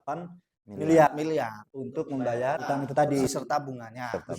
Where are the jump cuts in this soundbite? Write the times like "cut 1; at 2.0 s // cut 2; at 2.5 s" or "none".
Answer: cut 1; at 2.6 s // cut 2; at 3.3 s